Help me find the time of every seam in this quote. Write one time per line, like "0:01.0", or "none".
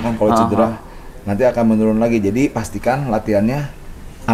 none